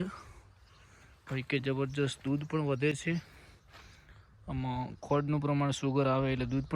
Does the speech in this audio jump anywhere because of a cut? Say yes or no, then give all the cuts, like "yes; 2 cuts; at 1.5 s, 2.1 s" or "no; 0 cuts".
no; 0 cuts